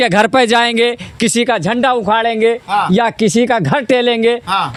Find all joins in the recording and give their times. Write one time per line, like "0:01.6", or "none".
none